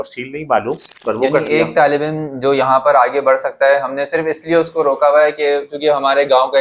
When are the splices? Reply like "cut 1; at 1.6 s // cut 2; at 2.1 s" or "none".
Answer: cut 1; at 0.9 s